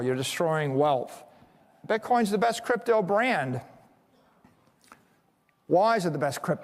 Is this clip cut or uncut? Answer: cut